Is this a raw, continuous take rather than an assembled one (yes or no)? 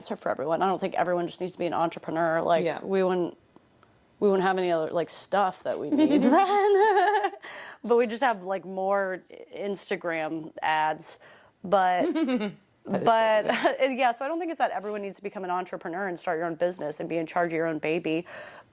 yes